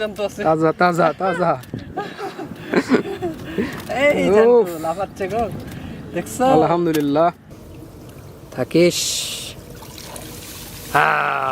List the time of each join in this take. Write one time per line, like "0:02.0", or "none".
0:07.5

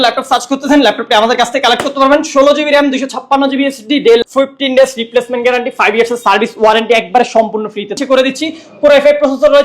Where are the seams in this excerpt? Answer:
0:04.2
0:08.0

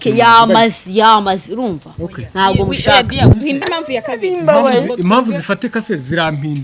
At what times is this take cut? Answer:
0:03.4

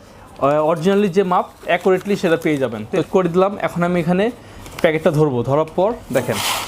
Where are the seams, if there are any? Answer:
0:03.0

